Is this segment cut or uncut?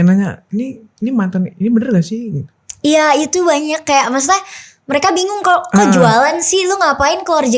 uncut